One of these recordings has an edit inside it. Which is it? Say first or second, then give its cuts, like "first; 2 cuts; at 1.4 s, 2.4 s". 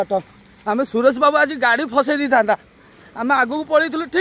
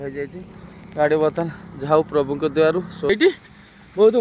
second; 1 cut; at 3.1 s